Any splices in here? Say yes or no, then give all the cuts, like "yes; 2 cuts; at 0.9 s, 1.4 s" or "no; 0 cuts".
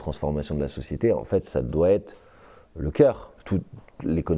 yes; 1 cut; at 3.3 s